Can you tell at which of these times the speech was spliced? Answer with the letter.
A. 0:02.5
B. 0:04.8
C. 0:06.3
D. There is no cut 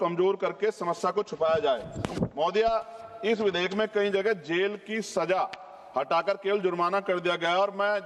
D